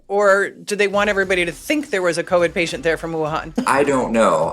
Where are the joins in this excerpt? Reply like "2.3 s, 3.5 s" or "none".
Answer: 3.6 s